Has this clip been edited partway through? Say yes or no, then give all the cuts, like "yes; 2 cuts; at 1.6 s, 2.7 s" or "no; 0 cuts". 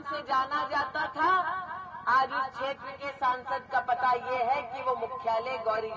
no; 0 cuts